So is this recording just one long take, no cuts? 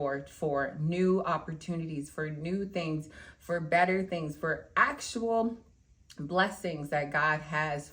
yes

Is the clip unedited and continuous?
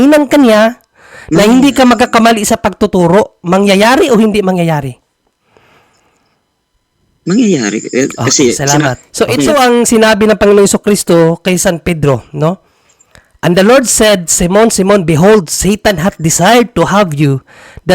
no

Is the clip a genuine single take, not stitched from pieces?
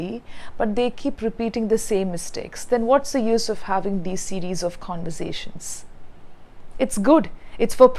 yes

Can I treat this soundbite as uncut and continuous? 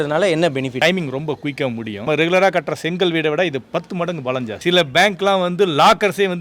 no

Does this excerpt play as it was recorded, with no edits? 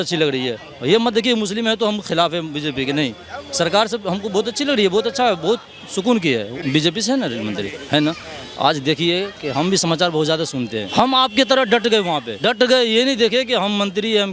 no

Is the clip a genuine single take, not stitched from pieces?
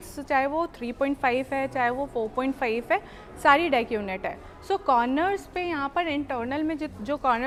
yes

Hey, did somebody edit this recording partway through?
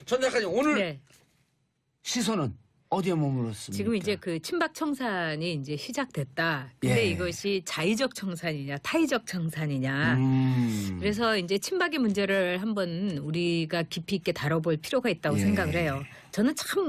no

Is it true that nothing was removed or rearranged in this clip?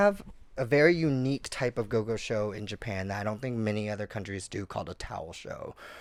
yes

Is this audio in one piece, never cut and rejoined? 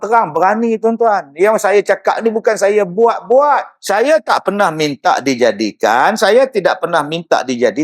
no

